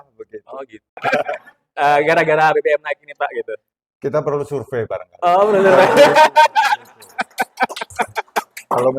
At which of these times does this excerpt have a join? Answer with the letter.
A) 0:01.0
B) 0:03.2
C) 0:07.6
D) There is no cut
A